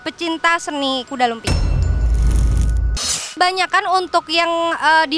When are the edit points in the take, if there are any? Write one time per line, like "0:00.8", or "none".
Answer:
0:01.4
0:03.4